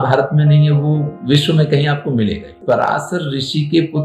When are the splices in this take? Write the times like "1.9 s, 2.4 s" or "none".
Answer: 2.6 s